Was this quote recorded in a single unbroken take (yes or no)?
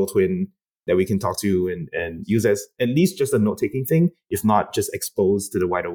no